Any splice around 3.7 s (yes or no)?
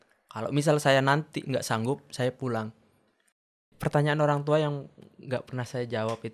yes